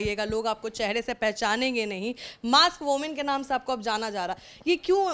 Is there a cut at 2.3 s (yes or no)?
no